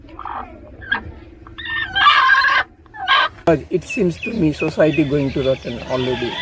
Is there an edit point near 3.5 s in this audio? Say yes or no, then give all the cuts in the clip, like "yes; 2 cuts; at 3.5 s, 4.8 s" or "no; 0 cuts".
yes; 1 cut; at 3.5 s